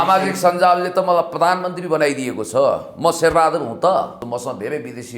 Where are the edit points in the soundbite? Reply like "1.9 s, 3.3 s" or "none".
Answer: 4.2 s